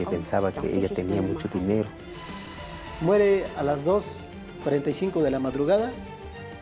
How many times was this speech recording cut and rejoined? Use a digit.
1